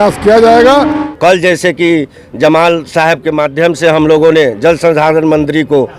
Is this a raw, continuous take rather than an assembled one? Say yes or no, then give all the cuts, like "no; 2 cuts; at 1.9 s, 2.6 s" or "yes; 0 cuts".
no; 1 cut; at 1.0 s